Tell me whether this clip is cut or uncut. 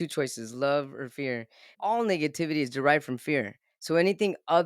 cut